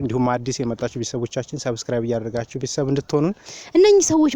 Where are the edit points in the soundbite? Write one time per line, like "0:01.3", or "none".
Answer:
0:03.4